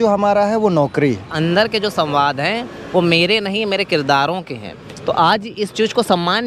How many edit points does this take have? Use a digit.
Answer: 1